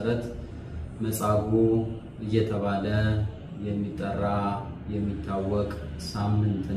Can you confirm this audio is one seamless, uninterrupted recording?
yes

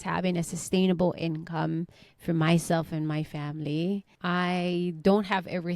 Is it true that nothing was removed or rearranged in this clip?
no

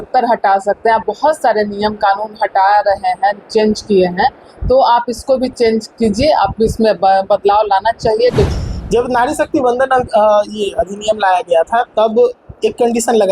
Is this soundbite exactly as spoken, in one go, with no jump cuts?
no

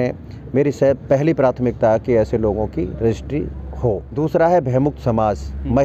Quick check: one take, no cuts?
no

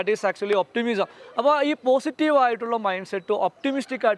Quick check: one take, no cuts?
yes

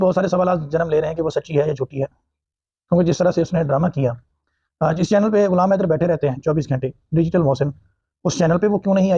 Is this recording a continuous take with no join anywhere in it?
yes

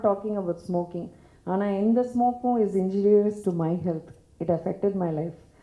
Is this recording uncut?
yes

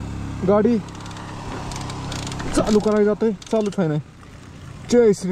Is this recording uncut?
yes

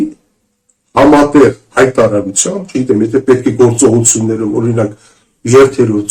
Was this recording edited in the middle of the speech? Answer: no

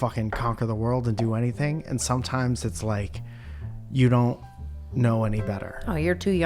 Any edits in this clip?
no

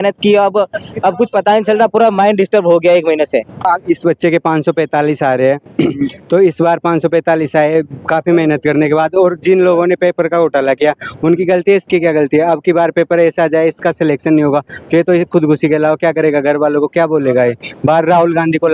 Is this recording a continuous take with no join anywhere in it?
yes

